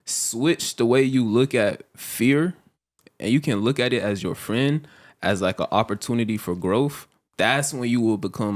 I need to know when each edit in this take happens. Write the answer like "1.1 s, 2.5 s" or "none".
none

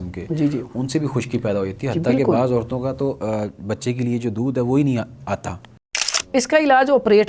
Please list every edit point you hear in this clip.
5.8 s

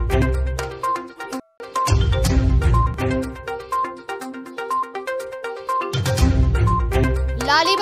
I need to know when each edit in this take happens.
none

